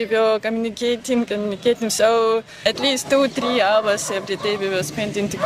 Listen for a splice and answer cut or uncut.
uncut